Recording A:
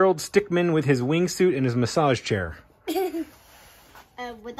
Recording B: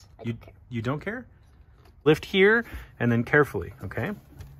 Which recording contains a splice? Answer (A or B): B